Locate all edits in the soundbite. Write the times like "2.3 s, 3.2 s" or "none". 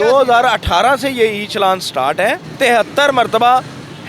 2.5 s